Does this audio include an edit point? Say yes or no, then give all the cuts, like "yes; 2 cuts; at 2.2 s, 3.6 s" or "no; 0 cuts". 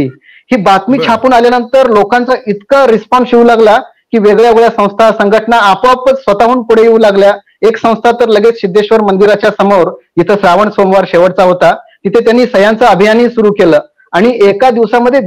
no; 0 cuts